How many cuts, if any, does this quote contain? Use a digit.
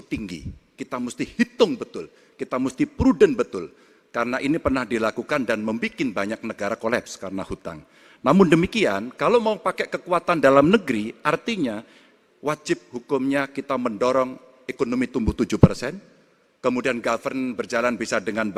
0